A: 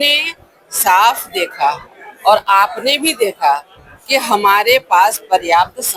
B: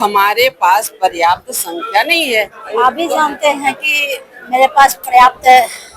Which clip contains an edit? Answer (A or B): B